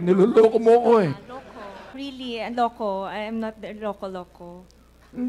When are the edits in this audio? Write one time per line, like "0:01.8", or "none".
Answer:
0:01.9